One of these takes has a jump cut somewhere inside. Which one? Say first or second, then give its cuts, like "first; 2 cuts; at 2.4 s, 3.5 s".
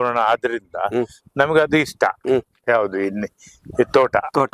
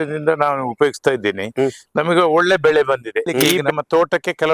second; 1 cut; at 3.6 s